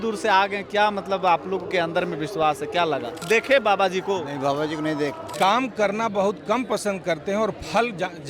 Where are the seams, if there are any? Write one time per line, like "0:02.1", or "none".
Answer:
0:03.1
0:05.2